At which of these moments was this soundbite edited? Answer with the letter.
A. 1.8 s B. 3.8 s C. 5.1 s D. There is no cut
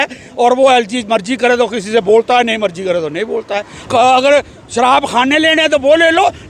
B